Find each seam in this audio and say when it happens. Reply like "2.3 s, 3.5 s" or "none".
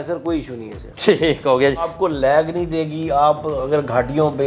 1.9 s